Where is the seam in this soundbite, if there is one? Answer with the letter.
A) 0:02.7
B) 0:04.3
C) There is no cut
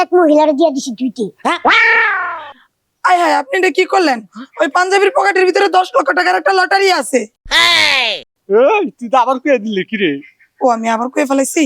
C